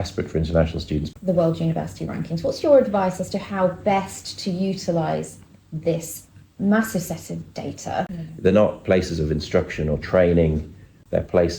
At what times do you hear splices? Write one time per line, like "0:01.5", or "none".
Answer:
0:01.1
0:08.2